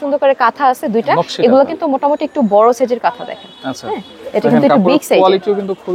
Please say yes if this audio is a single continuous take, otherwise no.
yes